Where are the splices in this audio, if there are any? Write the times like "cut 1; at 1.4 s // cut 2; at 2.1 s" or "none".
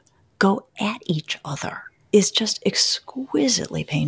cut 1; at 1.9 s

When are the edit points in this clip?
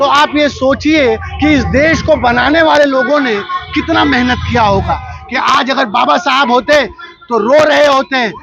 cut 1; at 5.1 s

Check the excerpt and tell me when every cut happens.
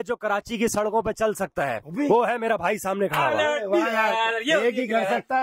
none

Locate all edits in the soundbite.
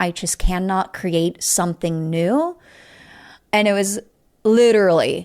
none

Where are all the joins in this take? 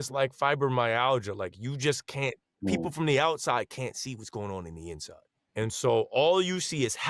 cut 1; at 5.3 s

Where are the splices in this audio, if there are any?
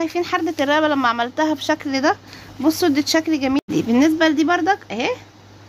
cut 1; at 3.6 s

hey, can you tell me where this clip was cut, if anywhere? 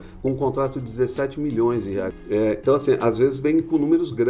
cut 1; at 2.1 s

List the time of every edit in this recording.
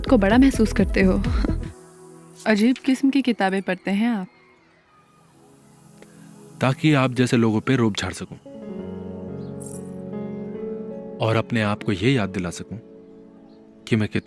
cut 1; at 1.7 s

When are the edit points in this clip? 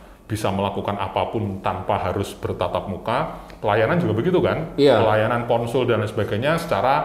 none

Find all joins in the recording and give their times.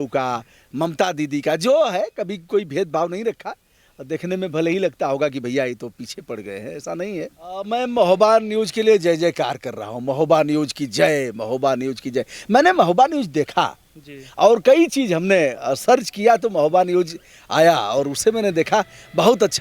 cut 1; at 7.7 s

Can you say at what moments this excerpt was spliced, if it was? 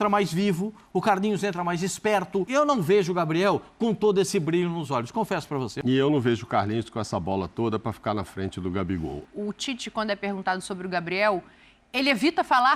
cut 1; at 2.5 s // cut 2; at 5.7 s // cut 3; at 9.3 s

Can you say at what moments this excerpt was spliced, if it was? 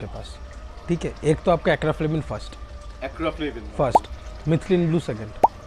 none

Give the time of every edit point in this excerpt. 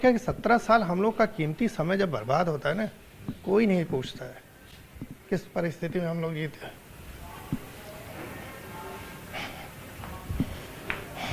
none

